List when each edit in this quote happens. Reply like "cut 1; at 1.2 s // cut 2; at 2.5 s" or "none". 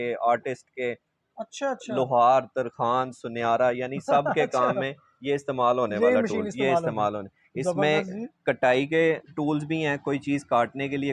none